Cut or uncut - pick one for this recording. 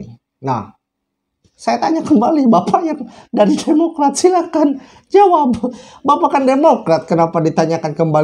uncut